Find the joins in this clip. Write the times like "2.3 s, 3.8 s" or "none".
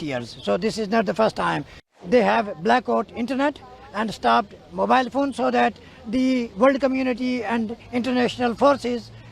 2.0 s